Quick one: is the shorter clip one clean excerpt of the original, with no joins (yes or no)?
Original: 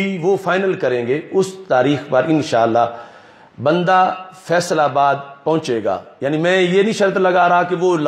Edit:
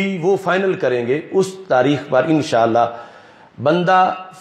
yes